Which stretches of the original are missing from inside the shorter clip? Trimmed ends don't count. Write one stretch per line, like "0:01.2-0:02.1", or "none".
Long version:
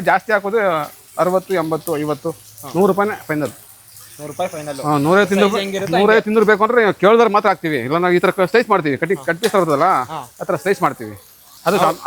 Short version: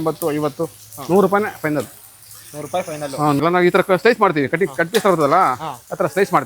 0:05.0-0:07.9